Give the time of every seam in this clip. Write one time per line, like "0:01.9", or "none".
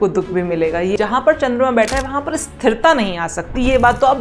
0:00.9